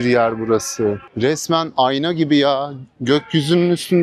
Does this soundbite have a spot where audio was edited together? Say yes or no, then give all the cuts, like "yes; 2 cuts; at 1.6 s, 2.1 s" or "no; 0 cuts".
yes; 1 cut; at 1.1 s